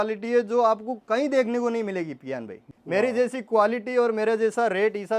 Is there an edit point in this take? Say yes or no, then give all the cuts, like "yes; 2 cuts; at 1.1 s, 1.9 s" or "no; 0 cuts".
yes; 1 cut; at 2.7 s